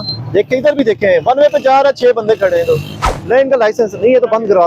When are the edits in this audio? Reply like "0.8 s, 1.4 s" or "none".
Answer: none